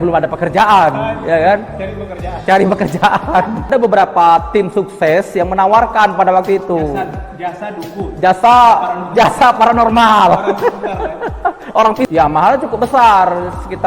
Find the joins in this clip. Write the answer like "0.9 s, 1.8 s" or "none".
3.7 s, 12.1 s